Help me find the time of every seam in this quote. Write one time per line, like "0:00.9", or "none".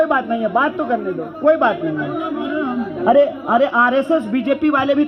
none